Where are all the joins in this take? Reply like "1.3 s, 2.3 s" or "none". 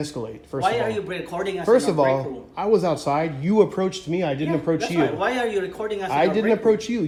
none